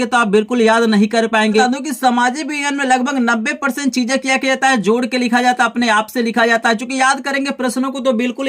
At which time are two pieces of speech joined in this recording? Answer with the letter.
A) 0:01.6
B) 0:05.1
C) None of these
A